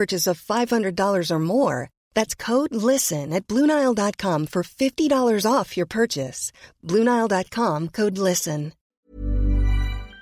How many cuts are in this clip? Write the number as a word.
one